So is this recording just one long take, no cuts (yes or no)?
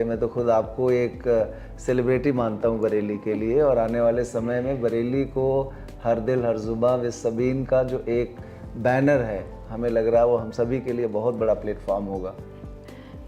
yes